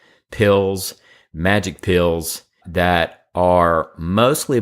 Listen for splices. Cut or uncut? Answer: cut